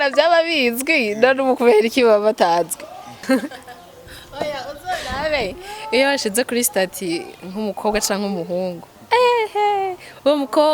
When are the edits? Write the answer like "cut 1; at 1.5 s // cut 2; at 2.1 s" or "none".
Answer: cut 1; at 3.2 s